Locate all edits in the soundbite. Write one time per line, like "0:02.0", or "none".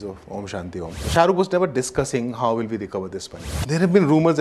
0:01.0
0:03.5